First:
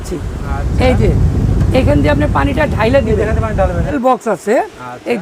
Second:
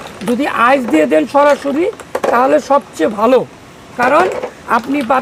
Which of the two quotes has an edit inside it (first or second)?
first